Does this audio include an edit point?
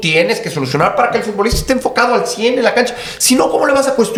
no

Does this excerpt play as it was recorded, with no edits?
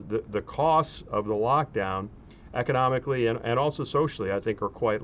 yes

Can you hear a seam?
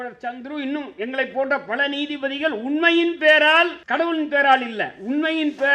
yes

